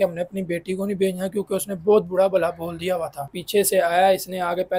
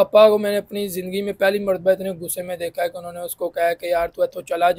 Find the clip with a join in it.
first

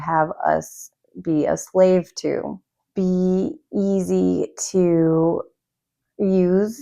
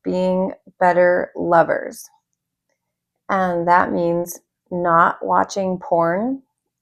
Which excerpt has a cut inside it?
first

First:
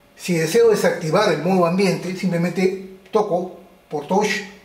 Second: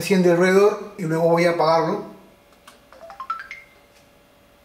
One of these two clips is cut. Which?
second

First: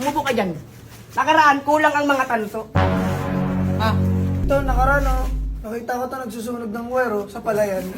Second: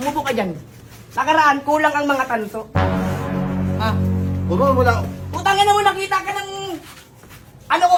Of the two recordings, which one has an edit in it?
first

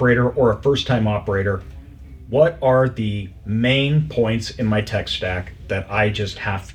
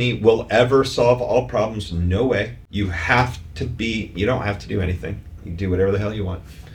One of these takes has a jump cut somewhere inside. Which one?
second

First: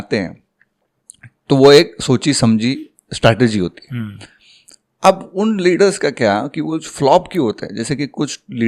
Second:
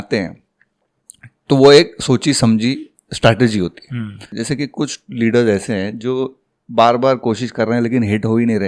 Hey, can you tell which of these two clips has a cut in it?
second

